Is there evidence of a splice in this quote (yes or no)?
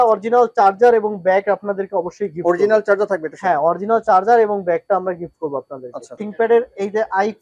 yes